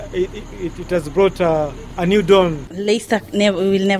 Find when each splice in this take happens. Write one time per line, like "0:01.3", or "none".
0:02.7